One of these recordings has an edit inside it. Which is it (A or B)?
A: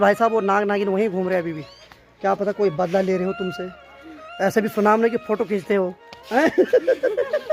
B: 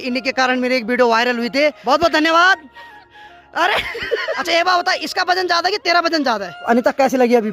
B